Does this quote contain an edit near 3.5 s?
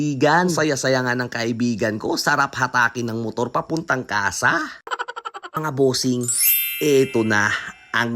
no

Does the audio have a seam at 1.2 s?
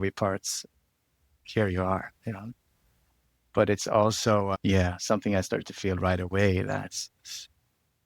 no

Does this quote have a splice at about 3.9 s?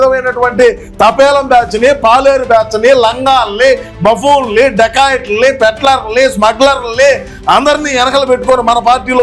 no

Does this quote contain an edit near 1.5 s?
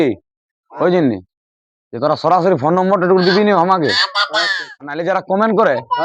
no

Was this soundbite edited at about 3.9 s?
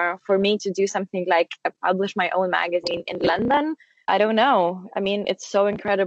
yes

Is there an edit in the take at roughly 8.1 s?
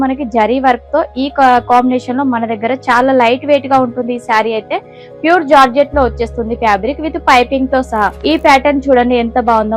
yes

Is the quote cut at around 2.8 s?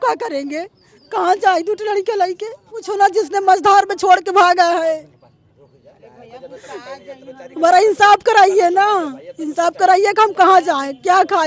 yes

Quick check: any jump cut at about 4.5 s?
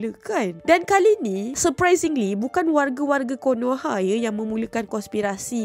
no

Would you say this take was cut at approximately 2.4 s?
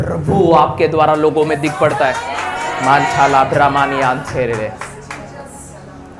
no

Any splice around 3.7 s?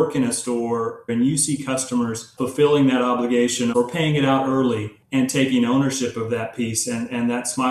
yes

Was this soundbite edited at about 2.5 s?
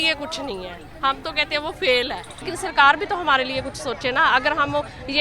yes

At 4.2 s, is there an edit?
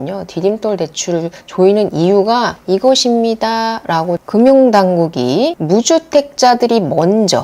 yes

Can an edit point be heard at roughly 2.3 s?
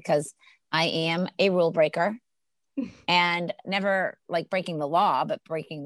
no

